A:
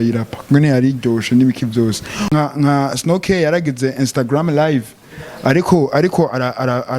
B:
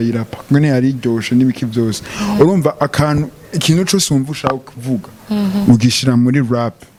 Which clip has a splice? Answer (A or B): A